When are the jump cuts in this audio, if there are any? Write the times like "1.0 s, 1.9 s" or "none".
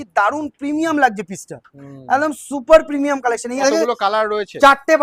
3.6 s